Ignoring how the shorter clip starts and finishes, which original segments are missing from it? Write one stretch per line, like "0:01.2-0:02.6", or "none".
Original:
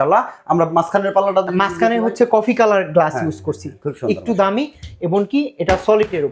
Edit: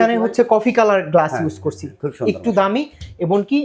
none